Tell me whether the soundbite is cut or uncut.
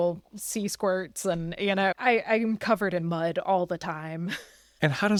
uncut